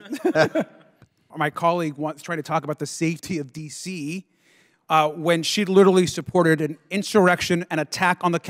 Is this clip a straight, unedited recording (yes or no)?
no